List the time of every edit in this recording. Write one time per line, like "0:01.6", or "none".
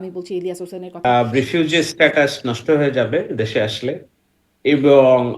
0:01.1